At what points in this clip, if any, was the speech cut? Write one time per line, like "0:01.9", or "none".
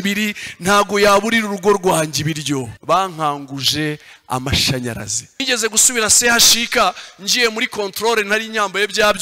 0:02.7
0:05.4

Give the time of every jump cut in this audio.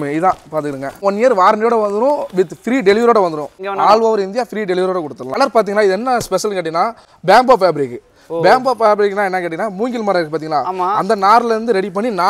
0:01.0
0:03.6
0:05.3

